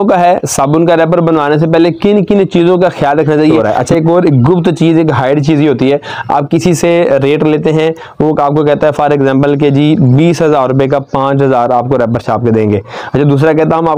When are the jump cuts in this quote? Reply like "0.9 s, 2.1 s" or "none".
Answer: 3.7 s